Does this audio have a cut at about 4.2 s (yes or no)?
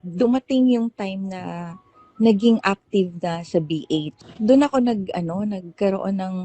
yes